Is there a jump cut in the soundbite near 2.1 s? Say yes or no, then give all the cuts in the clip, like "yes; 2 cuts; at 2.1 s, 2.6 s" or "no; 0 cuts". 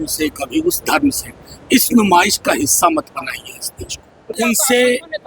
no; 1 cut; at 4.3 s